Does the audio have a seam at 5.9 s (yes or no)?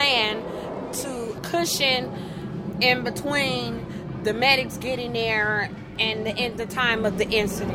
yes